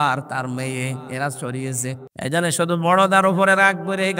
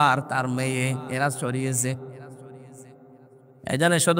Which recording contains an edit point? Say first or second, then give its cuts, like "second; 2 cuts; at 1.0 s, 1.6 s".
first; 1 cut; at 2.1 s